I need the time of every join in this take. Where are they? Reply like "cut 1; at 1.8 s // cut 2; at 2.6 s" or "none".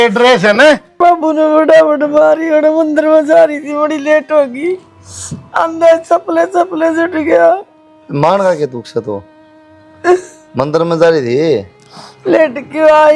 cut 1; at 1.0 s